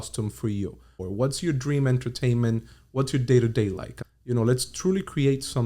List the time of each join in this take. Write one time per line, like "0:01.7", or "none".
0:01.0
0:03.9